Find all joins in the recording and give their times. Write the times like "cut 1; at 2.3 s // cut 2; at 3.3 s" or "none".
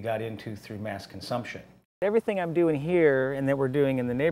cut 1; at 2.0 s